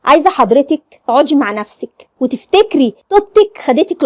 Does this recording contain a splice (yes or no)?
yes